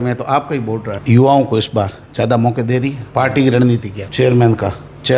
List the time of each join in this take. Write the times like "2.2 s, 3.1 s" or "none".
0.9 s, 4.0 s